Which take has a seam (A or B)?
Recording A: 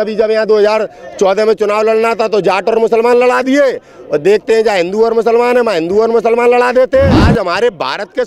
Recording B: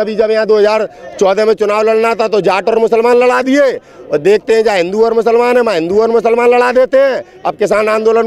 A